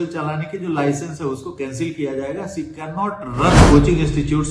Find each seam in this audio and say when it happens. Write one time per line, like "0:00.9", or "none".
0:03.6